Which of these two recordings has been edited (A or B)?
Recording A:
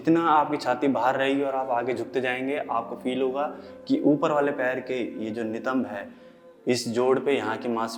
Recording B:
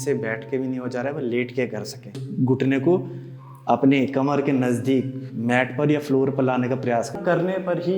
B